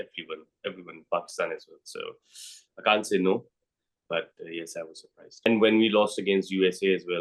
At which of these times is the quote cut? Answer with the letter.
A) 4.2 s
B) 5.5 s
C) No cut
B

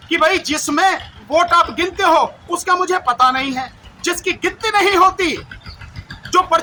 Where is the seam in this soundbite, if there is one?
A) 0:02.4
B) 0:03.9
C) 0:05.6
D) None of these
D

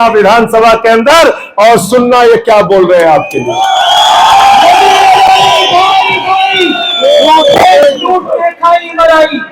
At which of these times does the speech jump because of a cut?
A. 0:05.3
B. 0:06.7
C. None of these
C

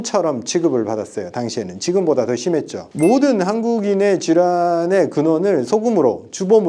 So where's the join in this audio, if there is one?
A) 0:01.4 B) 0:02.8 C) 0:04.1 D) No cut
B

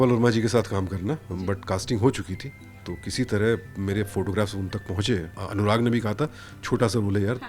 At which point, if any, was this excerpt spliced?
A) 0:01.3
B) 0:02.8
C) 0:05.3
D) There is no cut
C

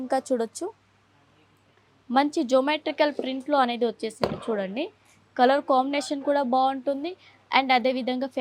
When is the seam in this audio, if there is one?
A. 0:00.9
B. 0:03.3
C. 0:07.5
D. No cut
D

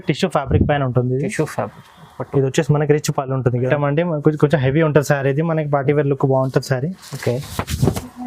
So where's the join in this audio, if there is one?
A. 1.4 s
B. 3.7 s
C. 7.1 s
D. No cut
B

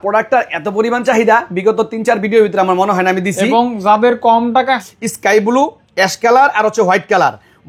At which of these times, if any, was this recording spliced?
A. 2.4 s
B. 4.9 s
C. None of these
B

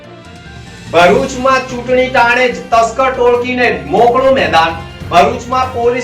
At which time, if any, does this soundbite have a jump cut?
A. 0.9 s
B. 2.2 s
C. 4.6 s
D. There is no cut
A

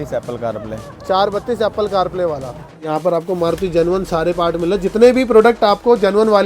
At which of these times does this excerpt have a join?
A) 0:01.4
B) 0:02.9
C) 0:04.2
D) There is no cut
B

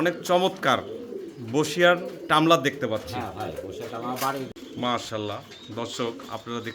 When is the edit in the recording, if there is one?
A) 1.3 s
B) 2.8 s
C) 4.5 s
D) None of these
C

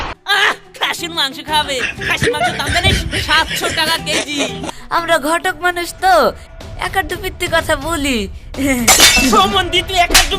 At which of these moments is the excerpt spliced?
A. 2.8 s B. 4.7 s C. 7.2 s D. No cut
B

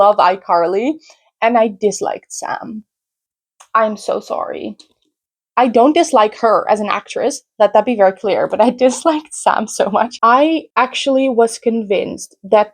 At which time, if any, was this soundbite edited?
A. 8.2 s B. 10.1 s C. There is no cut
B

